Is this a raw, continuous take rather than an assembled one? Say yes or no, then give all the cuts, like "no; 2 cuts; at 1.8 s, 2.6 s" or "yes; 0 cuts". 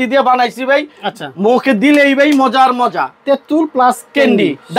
yes; 0 cuts